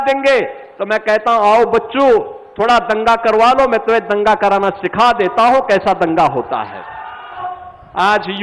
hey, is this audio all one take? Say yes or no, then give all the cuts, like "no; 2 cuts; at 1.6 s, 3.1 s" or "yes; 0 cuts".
no; 1 cut; at 7.4 s